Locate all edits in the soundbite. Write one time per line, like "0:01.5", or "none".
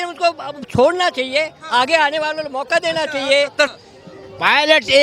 0:03.7